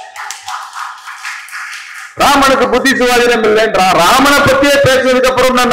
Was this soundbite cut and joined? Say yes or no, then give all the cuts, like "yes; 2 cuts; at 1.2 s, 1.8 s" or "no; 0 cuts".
no; 0 cuts